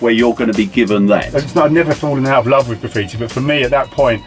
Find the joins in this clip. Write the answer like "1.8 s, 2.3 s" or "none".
1.3 s